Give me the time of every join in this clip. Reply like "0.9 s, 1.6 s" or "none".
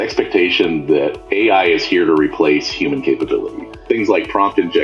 3.8 s